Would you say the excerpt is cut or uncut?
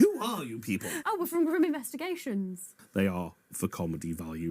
cut